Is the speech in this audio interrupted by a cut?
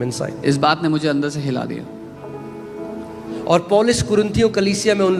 no; 0 cuts

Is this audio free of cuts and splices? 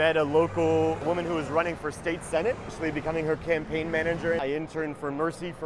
no; 3 cuts; at 1.0 s, 2.7 s, 4.4 s

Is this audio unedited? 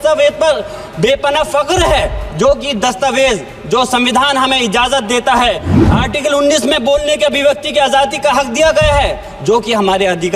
no; 1 cut; at 5.7 s

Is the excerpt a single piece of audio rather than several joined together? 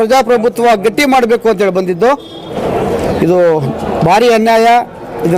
yes; 0 cuts

